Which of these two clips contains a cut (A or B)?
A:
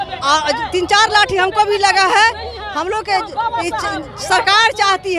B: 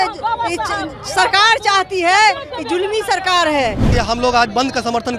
B